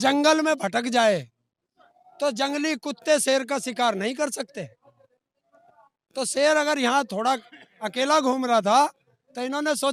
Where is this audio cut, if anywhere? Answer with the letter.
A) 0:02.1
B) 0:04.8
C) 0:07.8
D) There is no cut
D